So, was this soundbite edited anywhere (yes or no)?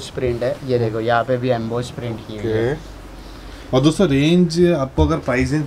no